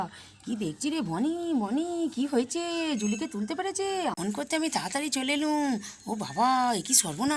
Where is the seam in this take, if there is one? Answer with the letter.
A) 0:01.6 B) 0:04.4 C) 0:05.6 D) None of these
B